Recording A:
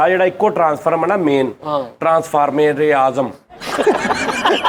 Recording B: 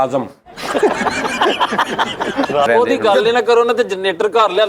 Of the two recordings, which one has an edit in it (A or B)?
B